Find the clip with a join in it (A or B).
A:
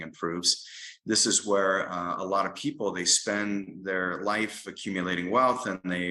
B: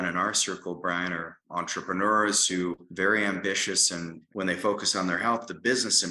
B